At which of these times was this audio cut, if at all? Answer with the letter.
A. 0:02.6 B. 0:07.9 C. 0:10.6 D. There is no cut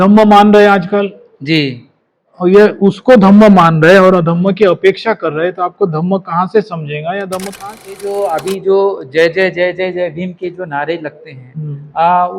B